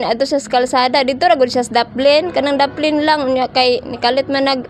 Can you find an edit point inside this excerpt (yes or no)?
no